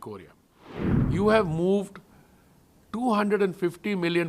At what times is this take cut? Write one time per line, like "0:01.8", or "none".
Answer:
0:00.9